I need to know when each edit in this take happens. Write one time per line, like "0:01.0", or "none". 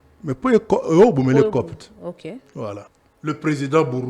0:03.0